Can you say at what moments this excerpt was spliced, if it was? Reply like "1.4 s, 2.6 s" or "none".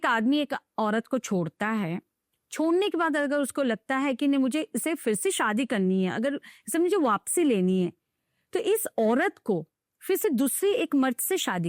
none